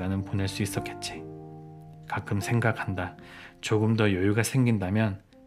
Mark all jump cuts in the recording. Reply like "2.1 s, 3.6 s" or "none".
0.8 s, 2.0 s

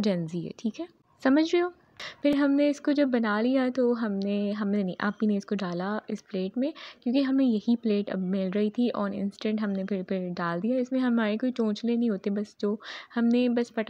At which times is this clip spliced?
none

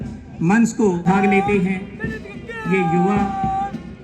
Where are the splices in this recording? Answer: 1.0 s

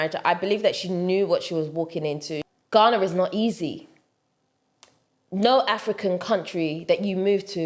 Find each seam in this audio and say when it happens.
2.5 s

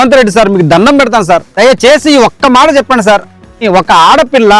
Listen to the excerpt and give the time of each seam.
1.5 s, 3.5 s

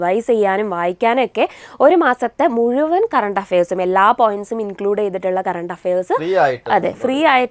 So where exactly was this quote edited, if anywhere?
none

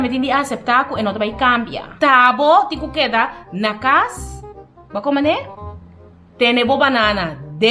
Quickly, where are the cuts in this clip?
1.9 s

